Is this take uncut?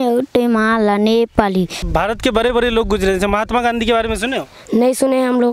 no; 1 cut; at 1.9 s

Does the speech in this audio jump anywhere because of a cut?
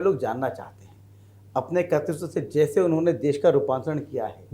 no; 0 cuts

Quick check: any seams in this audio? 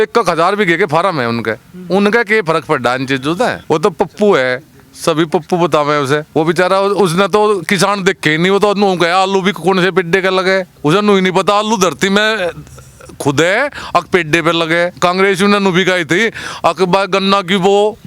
yes; 4 cuts; at 3.6 s, 6.3 s, 10.7 s, 14.9 s

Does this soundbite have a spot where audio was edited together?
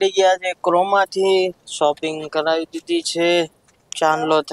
no; 0 cuts

